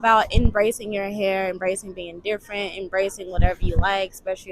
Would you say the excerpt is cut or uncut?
uncut